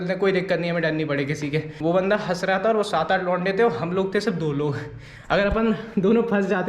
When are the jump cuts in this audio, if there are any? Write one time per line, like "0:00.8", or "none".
0:01.7